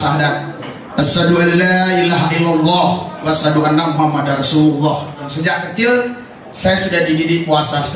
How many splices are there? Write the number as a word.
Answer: one